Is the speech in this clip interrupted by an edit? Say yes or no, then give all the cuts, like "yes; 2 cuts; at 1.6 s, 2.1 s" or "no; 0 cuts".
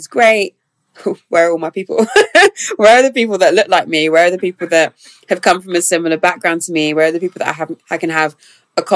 no; 0 cuts